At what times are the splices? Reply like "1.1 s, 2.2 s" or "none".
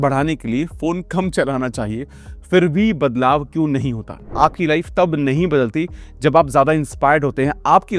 4.2 s